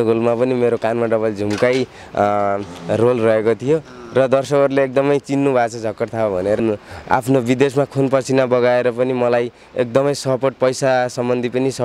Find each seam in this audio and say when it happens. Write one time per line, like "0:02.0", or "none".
0:06.6